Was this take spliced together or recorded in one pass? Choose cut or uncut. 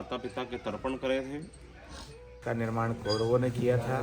cut